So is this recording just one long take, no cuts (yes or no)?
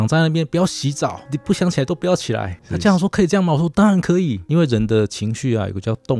no